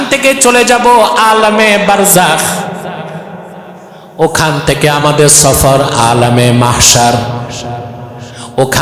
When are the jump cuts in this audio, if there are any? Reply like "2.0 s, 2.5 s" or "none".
none